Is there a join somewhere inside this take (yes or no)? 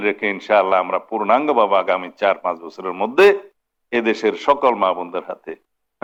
no